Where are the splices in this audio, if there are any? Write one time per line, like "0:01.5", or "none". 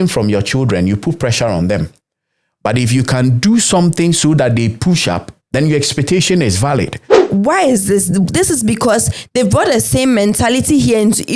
0:07.3